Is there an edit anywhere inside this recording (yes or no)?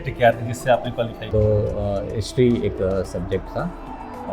yes